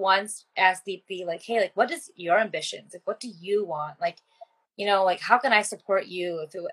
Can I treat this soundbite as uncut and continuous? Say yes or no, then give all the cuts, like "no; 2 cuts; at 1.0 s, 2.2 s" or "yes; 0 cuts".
yes; 0 cuts